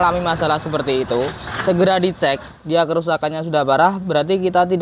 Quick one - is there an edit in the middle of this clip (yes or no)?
yes